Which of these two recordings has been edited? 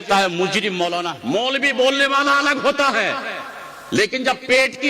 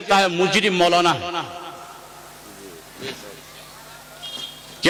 first; 1 cut; at 1.1 s

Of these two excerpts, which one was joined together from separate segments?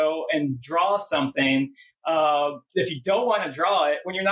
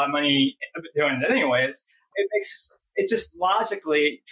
second; 1 cut; at 2.1 s

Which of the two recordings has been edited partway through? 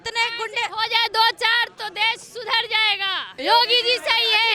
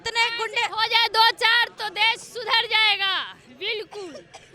first; 1 cut; at 3.3 s

